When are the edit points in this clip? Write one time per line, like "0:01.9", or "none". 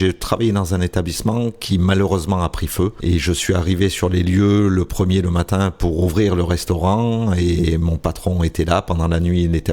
0:03.0